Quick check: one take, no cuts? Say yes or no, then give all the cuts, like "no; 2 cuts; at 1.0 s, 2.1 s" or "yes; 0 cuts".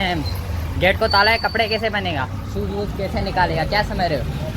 yes; 0 cuts